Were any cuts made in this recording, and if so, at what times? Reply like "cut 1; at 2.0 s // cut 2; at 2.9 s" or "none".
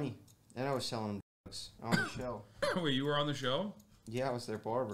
none